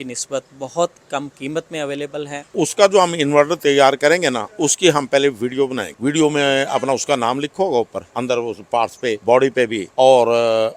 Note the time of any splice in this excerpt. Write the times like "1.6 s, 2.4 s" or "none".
2.5 s, 5.9 s, 8.0 s, 9.2 s, 9.8 s